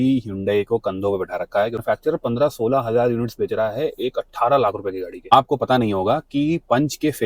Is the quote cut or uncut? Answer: cut